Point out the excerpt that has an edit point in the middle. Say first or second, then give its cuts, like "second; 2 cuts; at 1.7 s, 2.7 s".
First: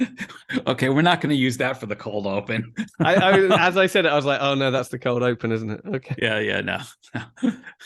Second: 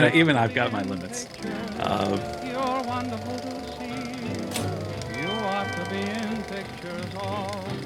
second; 1 cut; at 2.3 s